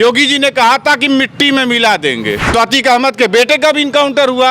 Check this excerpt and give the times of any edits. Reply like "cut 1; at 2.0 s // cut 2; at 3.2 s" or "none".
cut 1; at 2.4 s